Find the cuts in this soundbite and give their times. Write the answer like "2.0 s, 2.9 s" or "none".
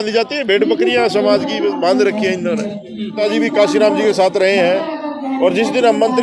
3.2 s

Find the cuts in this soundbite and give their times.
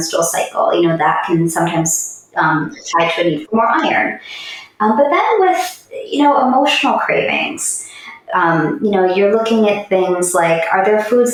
none

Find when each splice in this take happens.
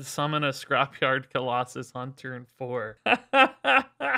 2.9 s

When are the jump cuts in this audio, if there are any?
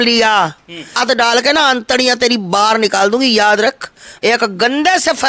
1.0 s, 4.0 s

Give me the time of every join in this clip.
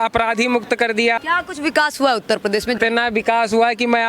1.2 s, 2.8 s

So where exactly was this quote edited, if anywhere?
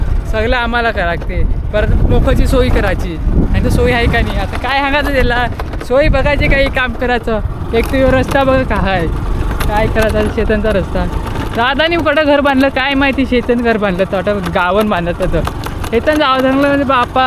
none

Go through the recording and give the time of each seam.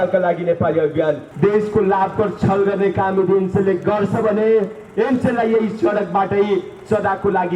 1.3 s

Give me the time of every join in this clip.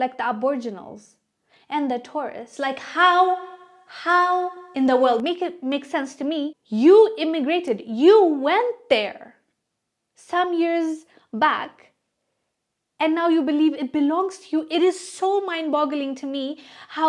6.6 s

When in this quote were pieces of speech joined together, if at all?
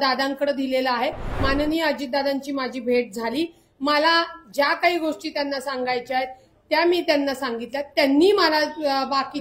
1.3 s

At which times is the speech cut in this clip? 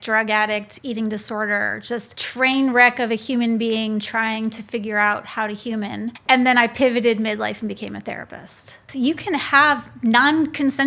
2.2 s, 6.1 s, 8.8 s

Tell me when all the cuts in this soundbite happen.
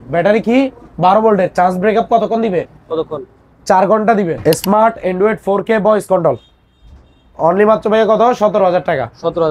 4.5 s

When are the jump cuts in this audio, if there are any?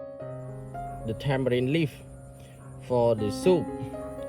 1.0 s

